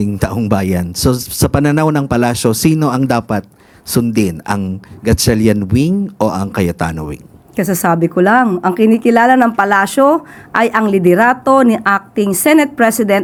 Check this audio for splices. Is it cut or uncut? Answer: uncut